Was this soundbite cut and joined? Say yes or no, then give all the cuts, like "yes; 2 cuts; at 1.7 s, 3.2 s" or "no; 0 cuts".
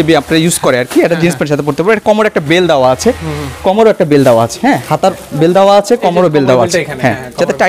no; 0 cuts